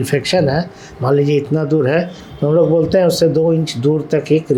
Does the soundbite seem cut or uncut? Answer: uncut